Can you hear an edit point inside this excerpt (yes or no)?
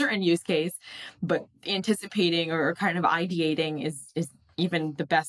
no